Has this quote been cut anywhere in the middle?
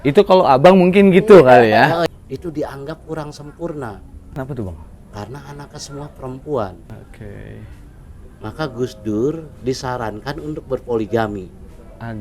yes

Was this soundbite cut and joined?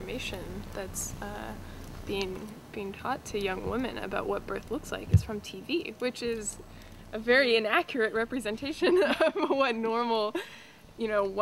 no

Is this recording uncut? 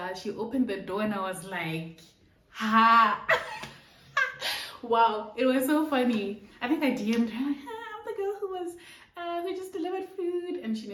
yes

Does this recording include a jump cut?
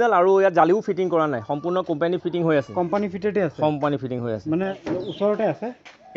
yes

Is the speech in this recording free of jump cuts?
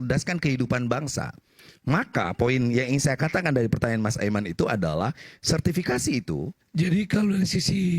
no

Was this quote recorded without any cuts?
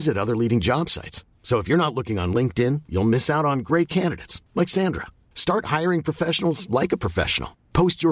yes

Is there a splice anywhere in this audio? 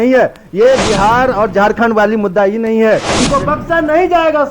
yes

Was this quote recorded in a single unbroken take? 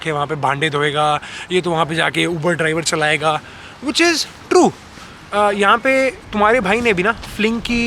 yes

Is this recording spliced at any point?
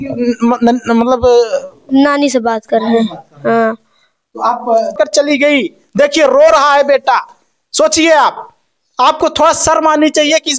yes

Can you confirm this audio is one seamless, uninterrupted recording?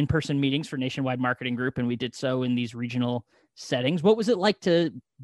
yes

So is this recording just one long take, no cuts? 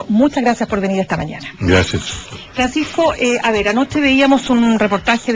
no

